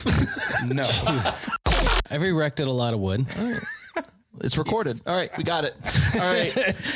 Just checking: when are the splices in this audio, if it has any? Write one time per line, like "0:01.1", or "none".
0:01.6